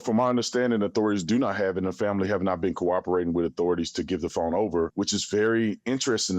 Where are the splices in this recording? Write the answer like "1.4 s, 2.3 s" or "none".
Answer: 4.9 s

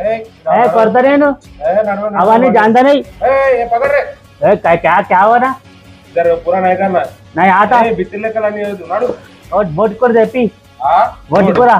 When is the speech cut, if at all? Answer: 4.2 s, 9.2 s

